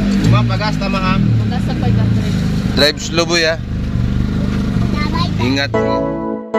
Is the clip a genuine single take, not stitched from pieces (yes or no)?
no